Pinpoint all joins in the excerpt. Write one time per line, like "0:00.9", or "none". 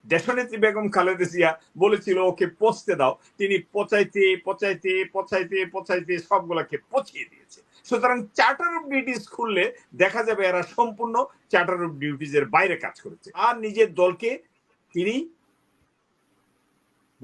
0:13.4